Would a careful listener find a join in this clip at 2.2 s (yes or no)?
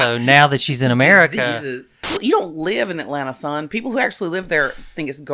yes